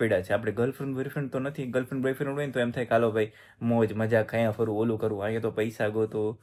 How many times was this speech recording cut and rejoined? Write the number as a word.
zero